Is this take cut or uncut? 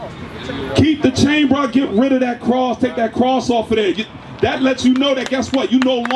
uncut